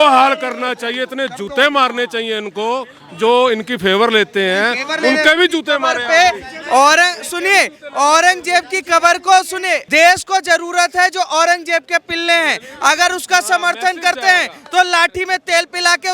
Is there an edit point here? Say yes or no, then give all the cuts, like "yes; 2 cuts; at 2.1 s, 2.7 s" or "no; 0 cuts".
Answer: no; 0 cuts